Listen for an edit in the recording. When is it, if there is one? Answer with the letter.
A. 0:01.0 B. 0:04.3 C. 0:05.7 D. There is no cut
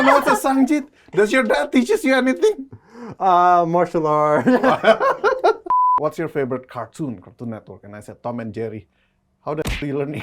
C